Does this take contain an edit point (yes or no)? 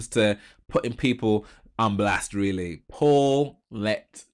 no